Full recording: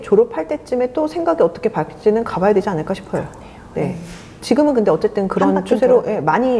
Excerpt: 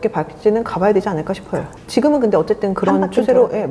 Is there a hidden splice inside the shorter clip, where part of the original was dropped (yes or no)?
yes